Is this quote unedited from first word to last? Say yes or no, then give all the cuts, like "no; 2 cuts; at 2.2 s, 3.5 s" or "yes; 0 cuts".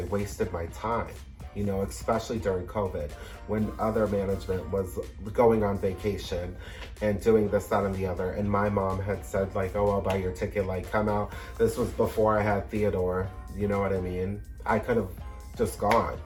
yes; 0 cuts